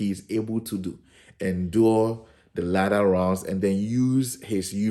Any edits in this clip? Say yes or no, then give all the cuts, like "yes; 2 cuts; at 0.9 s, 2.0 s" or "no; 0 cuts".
no; 0 cuts